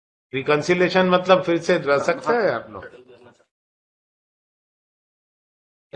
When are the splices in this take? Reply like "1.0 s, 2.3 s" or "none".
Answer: none